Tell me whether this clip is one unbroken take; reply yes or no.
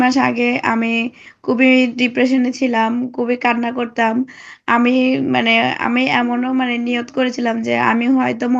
yes